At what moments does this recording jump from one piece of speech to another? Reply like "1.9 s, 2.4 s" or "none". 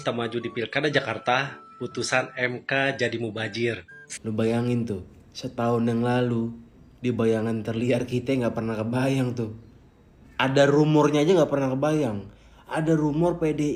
3.8 s